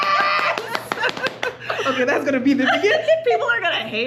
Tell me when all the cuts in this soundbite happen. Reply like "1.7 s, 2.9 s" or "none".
none